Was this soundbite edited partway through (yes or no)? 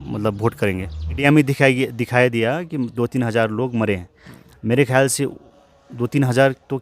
yes